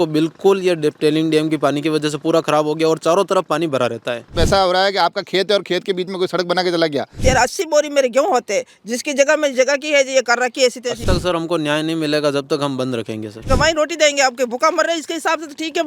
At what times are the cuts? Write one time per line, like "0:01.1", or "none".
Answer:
0:04.3
0:07.2
0:11.0
0:13.5